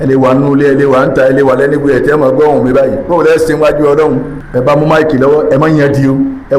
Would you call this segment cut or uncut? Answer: cut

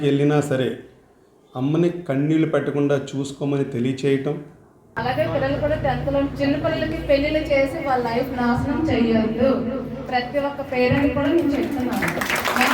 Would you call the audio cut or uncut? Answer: cut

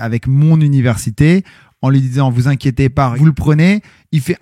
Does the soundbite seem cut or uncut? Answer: cut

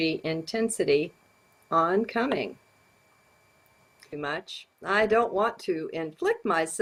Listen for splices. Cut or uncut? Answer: uncut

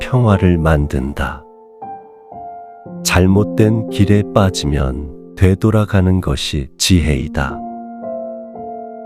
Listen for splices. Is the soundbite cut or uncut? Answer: uncut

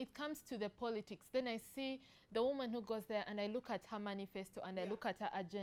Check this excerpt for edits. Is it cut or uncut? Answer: uncut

